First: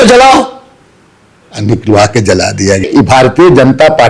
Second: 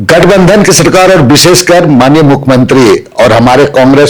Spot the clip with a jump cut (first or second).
first